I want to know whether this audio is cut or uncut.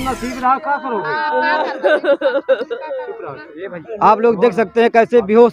uncut